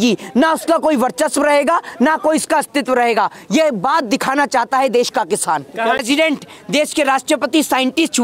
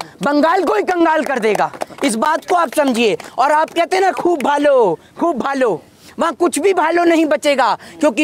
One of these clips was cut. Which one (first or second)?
first